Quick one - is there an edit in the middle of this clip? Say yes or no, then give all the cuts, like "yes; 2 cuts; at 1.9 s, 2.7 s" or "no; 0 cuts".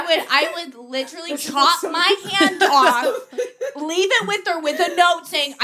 no; 0 cuts